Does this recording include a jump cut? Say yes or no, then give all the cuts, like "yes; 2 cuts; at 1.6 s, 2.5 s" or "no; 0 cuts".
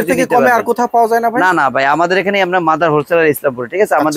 no; 0 cuts